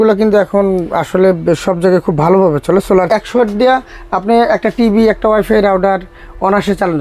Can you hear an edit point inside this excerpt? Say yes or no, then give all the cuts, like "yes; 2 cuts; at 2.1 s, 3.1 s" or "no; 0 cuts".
yes; 1 cut; at 3.2 s